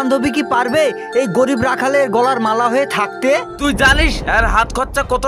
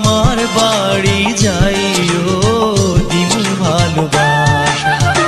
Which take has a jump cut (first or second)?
first